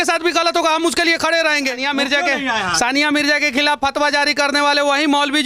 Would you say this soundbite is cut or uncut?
cut